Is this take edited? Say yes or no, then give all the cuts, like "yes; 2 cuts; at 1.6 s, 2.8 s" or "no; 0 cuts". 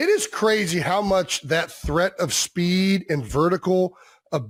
no; 0 cuts